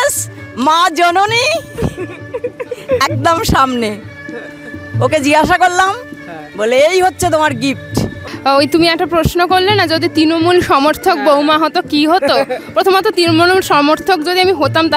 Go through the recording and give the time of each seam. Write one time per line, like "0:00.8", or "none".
0:08.2